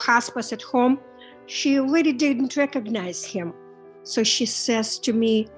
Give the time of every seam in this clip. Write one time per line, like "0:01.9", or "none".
none